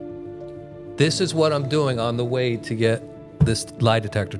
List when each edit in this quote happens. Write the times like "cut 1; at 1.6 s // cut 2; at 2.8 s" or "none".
none